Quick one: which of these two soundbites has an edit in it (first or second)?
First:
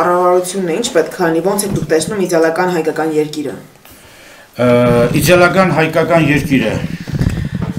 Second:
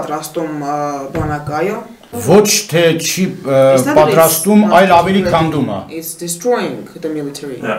second